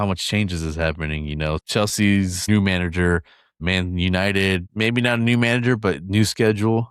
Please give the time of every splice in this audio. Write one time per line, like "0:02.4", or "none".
0:01.6
0:02.4
0:03.6
0:04.7